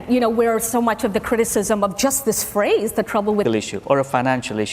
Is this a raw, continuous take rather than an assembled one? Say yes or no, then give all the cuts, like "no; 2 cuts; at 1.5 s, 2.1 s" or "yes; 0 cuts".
no; 1 cut; at 3.4 s